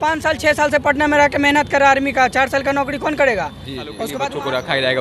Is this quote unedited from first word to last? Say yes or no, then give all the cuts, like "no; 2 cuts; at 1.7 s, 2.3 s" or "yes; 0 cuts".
no; 1 cut; at 4.1 s